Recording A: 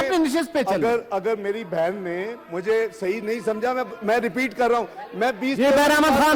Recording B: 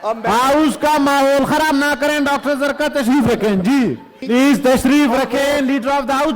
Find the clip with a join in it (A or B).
B